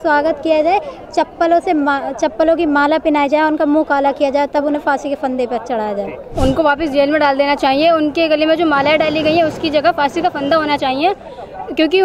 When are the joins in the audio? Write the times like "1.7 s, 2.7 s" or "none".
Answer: 6.2 s